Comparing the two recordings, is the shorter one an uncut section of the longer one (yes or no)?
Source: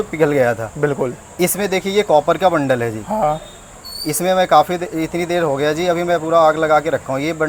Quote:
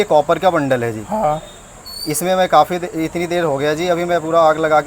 yes